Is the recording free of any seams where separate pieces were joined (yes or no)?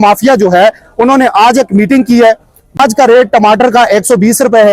no